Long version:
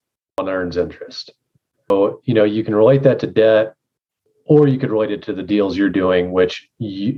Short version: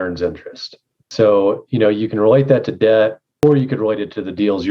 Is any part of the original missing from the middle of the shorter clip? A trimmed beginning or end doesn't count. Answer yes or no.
yes